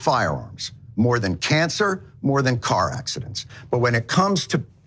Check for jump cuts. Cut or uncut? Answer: cut